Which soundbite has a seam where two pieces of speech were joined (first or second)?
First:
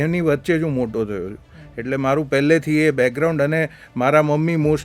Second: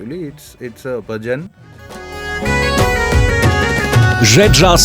second